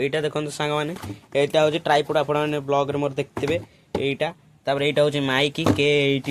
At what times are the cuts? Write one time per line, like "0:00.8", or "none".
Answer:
none